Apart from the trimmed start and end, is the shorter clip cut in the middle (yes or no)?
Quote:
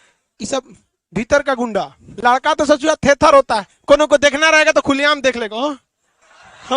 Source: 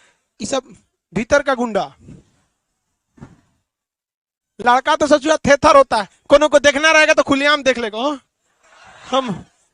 yes